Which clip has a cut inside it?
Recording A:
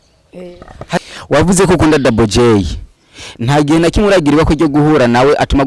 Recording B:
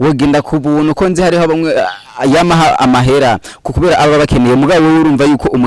A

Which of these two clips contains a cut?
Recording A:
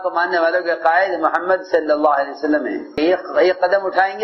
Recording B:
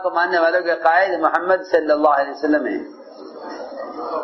A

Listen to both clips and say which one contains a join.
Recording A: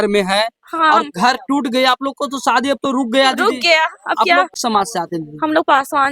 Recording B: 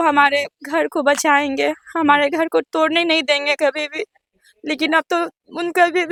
A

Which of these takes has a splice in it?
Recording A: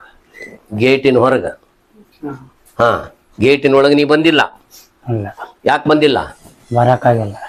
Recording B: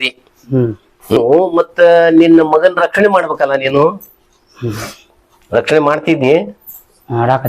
B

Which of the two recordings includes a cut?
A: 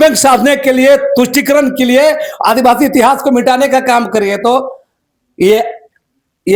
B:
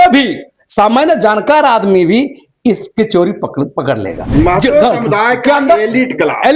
B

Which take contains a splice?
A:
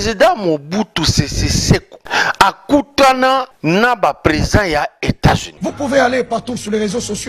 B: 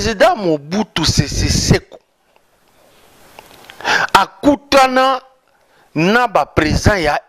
A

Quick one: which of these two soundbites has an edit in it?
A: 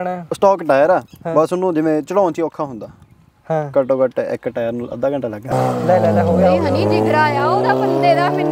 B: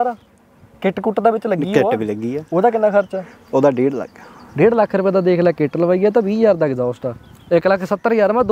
A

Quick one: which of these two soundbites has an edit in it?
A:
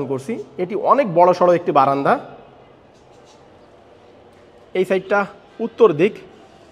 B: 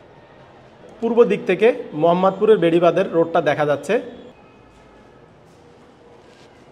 B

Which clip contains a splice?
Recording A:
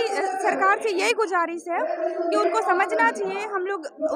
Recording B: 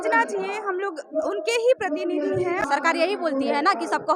B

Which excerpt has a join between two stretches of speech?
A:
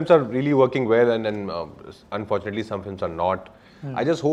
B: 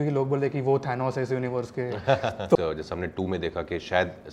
B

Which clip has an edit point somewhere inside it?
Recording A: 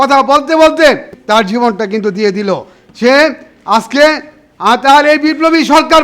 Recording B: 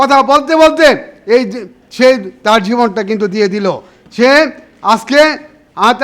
A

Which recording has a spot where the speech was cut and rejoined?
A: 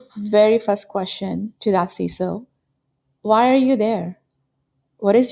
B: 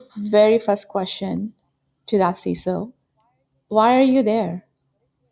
A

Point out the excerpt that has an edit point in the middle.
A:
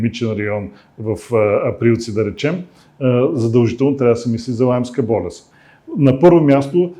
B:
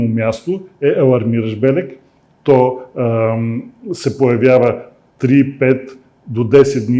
A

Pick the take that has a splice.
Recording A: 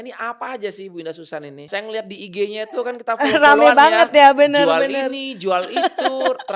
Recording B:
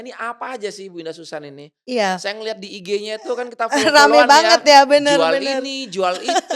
A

